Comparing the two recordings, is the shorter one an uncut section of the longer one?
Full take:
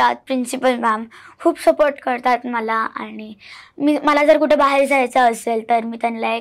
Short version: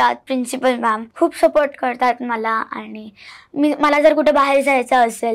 no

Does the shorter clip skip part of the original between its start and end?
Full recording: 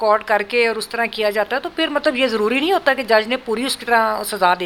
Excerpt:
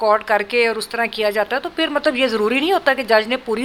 no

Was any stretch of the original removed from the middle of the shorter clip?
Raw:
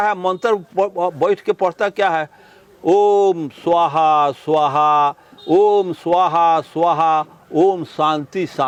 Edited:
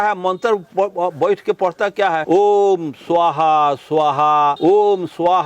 yes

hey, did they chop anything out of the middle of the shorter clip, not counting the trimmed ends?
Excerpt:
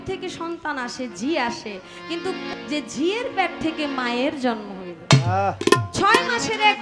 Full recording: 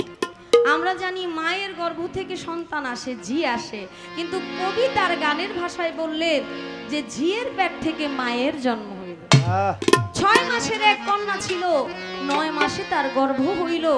yes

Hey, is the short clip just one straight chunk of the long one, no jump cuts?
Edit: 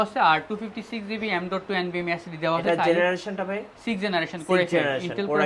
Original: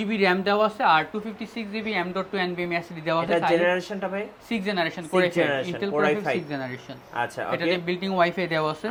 yes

